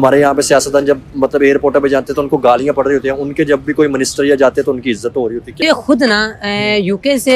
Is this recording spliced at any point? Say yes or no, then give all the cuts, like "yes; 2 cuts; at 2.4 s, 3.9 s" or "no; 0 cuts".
yes; 1 cut; at 5.6 s